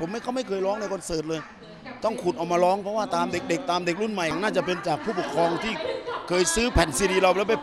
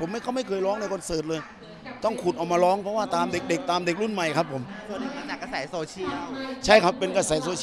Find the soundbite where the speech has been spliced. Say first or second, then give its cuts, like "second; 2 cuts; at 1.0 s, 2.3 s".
first; 1 cut; at 4.3 s